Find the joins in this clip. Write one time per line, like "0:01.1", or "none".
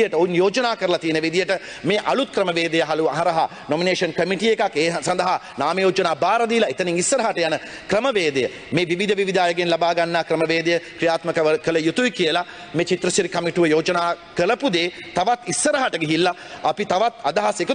none